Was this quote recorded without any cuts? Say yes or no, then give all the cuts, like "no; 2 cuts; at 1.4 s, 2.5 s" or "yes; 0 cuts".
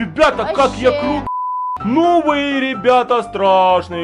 no; 1 cut; at 1.2 s